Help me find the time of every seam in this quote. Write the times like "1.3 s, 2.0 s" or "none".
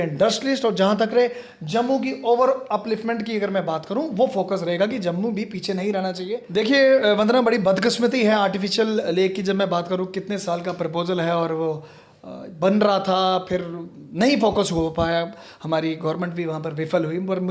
6.2 s